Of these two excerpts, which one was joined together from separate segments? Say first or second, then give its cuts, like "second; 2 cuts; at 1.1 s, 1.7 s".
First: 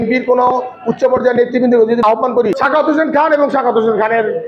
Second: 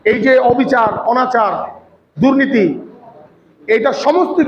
first; 1 cut; at 2.0 s